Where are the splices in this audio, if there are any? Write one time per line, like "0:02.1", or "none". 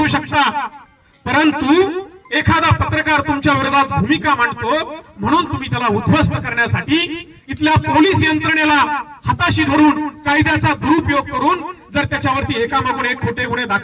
none